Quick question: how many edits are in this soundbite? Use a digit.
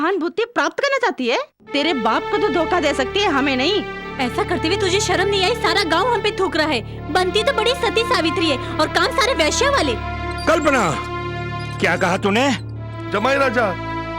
0